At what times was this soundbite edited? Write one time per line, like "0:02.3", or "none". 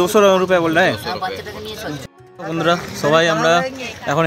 0:02.0